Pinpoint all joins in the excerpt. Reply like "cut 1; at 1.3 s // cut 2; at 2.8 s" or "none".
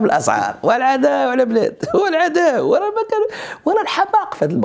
none